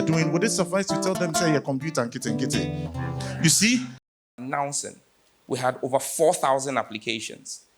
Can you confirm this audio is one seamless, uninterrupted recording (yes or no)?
no